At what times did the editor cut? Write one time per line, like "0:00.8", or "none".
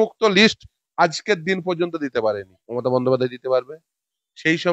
0:02.5